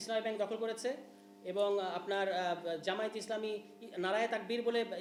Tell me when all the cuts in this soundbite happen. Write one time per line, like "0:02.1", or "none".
none